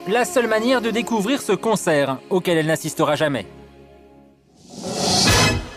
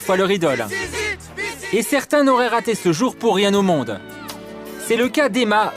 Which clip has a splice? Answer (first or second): second